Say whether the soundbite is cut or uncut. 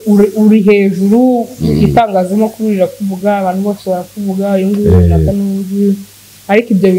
uncut